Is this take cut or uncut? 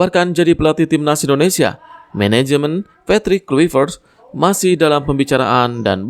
uncut